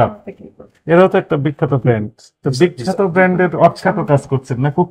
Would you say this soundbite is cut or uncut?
uncut